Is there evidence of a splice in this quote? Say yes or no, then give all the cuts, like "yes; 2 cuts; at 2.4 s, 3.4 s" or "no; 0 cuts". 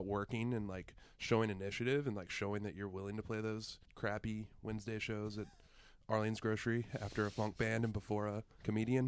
yes; 1 cut; at 3.8 s